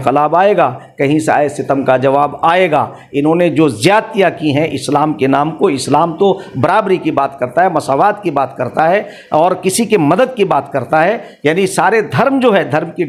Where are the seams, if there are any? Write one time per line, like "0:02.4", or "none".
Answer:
none